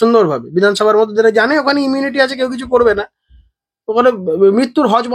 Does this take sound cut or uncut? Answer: uncut